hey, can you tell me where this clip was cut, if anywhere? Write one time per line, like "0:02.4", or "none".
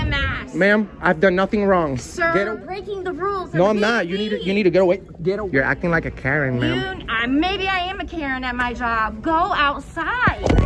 0:02.4
0:05.4